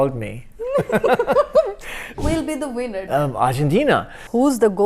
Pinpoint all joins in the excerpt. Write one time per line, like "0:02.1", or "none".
0:02.2